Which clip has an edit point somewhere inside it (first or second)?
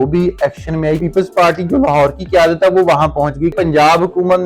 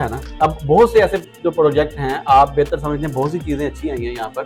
first